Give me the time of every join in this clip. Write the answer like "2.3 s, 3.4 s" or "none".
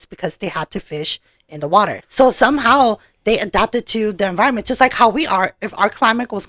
2.0 s